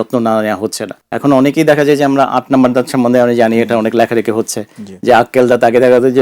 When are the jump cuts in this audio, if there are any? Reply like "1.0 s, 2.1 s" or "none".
none